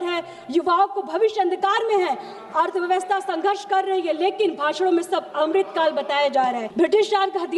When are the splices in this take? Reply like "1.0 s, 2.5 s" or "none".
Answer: 6.7 s